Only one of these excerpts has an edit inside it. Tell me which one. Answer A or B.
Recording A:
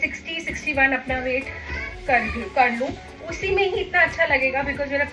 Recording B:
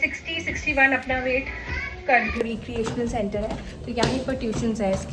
B